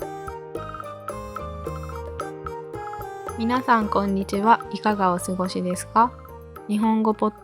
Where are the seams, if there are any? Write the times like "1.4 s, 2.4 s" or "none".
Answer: 3.4 s